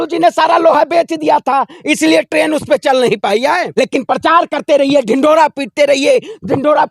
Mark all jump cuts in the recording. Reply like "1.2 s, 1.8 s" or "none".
3.7 s